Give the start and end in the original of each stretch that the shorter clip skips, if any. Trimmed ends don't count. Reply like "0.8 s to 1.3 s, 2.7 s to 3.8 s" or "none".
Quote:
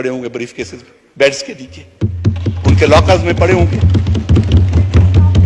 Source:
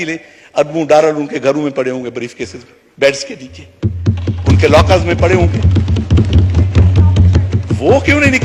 none